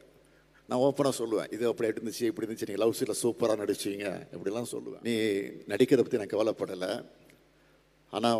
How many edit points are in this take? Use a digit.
1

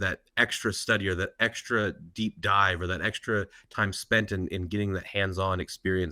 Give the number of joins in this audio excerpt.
0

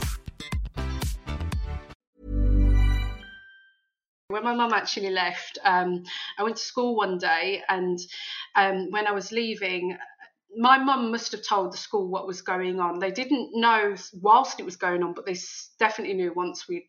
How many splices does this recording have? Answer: 1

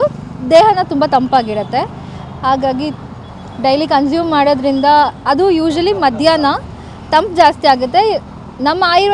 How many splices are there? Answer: 0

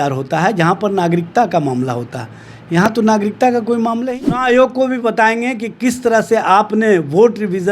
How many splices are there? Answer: 1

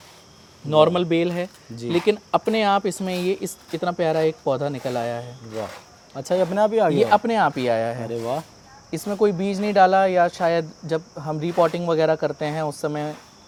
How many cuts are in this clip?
0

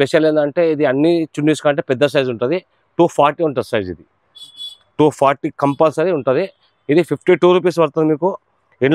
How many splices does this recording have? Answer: 0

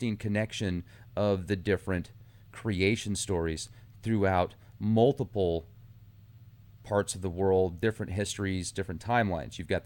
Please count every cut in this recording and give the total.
1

